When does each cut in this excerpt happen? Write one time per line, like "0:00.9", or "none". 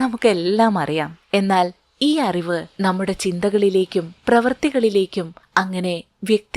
0:01.2
0:02.7
0:05.4

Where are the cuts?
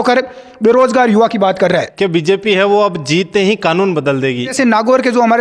0:01.9
0:04.5

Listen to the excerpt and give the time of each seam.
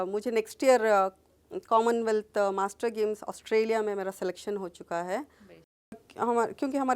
0:06.0

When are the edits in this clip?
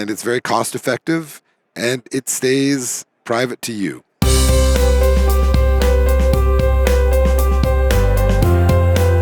0:04.1

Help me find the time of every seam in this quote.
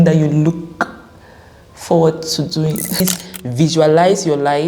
0:03.0

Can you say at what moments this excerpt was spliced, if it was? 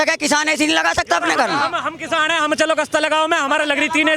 none

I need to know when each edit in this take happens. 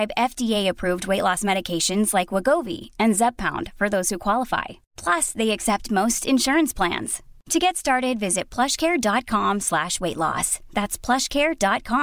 none

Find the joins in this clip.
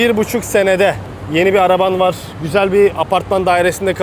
0:01.1
0:02.3

